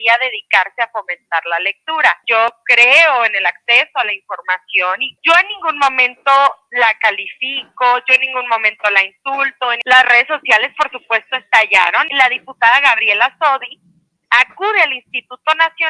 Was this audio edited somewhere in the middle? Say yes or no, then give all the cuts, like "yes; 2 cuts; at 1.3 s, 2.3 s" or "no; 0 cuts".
yes; 4 cuts; at 2.2 s, 5.1 s, 9.8 s, 12.1 s